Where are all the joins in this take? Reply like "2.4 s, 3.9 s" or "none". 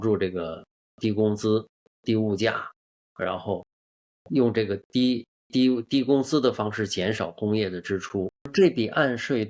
8.5 s

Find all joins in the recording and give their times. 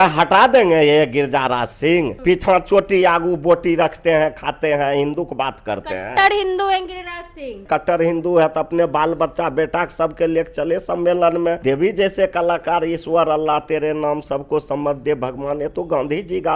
2.1 s, 7.6 s, 11.6 s

